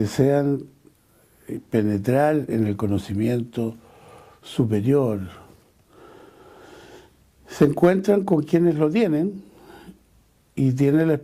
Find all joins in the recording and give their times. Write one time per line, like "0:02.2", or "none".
none